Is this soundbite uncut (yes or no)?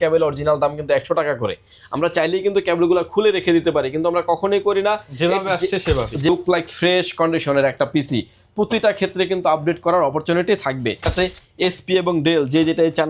no